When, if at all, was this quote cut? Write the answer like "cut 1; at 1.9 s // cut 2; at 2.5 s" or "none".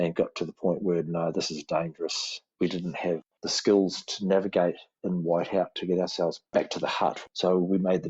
cut 1; at 2.5 s // cut 2; at 3.3 s